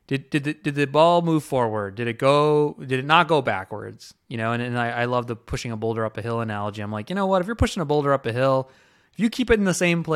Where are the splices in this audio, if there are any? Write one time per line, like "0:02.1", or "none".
none